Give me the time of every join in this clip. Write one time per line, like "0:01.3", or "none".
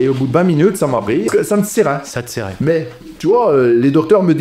0:01.3